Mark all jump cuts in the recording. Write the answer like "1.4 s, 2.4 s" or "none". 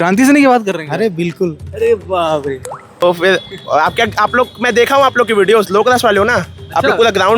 3.0 s